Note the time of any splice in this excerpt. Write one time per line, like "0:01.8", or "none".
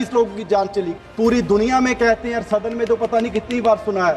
0:01.0